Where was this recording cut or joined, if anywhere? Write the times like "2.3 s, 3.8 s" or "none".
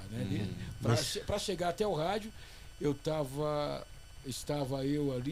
none